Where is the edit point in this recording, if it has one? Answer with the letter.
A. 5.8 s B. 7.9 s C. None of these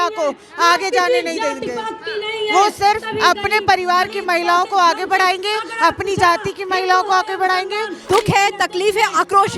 B